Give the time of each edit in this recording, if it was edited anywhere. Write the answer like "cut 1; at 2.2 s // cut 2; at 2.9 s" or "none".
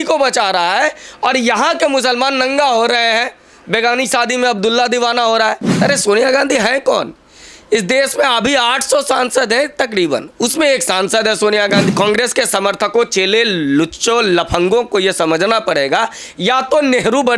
cut 1; at 5.8 s // cut 2; at 11.9 s